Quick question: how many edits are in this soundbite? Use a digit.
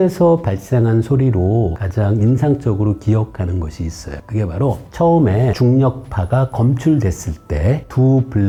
0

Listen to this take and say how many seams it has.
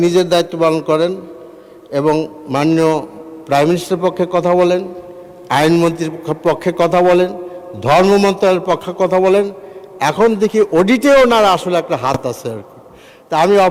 0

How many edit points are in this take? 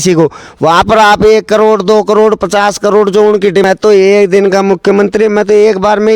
1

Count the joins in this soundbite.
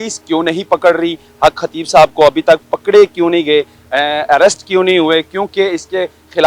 0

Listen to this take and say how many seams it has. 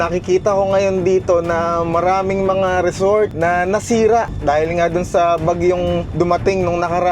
3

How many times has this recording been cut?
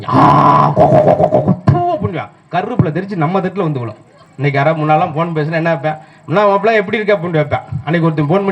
1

